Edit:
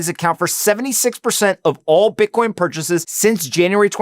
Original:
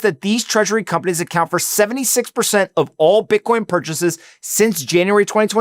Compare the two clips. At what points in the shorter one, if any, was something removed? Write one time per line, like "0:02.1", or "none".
0:03.1